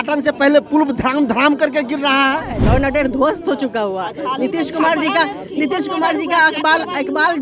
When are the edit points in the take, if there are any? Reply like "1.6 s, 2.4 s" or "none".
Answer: 2.6 s